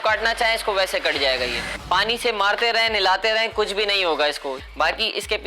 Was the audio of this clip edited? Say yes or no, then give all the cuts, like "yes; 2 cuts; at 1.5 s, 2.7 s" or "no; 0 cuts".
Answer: yes; 2 cuts; at 1.7 s, 4.5 s